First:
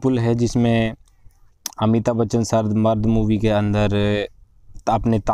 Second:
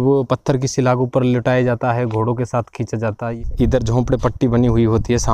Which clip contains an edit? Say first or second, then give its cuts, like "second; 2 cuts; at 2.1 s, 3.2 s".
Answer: second; 1 cut; at 3.3 s